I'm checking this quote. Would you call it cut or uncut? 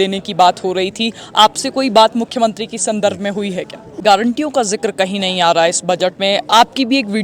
cut